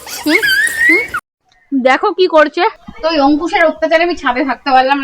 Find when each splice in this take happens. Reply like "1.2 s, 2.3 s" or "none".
1.2 s, 2.9 s